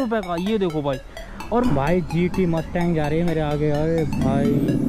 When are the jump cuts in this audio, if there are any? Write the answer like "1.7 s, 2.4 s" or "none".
1.7 s